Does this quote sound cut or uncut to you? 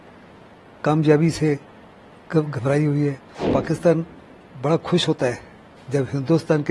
cut